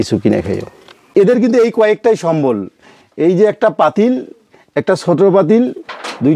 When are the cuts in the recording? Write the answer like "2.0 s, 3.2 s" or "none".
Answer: 1.1 s